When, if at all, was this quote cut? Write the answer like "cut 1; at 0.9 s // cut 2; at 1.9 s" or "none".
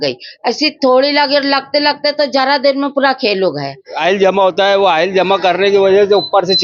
cut 1; at 3.9 s